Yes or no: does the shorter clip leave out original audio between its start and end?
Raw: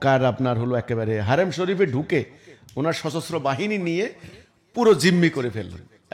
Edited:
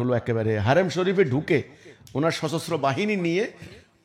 no